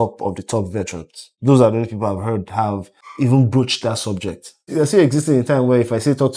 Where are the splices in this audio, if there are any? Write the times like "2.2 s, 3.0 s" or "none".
1.3 s, 3.0 s, 4.7 s